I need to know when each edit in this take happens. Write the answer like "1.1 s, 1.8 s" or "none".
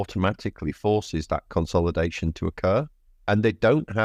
none

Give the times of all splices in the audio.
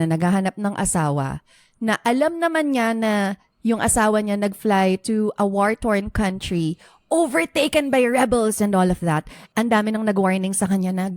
9.3 s

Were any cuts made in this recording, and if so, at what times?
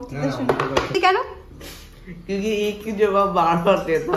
0.9 s

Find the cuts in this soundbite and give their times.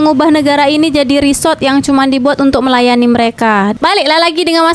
3.8 s

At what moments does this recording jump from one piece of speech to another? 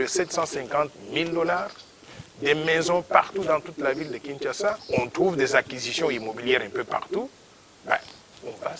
4.8 s

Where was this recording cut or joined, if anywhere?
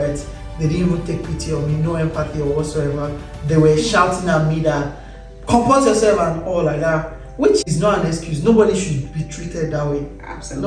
7.7 s

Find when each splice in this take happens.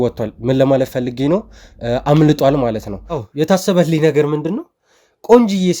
3.3 s

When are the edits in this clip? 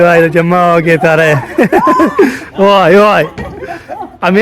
none

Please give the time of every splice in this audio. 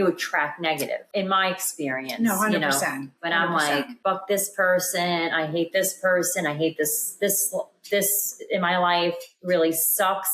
1.0 s, 3.9 s

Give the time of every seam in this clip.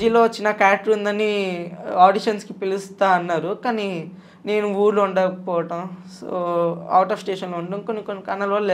none

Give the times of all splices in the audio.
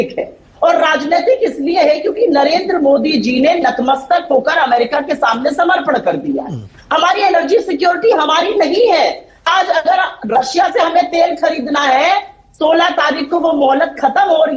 none

